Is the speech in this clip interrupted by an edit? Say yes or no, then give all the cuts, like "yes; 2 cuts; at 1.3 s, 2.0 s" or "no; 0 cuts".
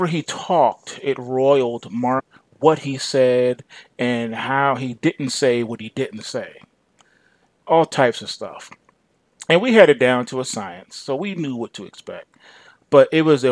no; 0 cuts